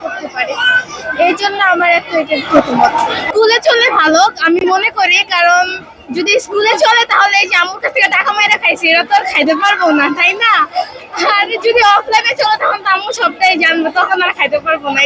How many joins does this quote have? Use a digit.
1